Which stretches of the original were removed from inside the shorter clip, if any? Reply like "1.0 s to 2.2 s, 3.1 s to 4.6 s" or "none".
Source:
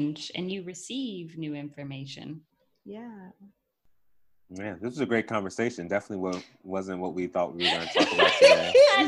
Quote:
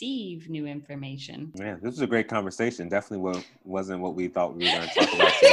2.4 s to 4.5 s